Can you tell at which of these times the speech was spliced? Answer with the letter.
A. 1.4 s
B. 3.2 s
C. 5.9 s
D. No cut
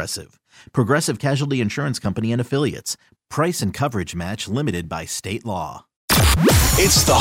C